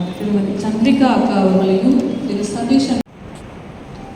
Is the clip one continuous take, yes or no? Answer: no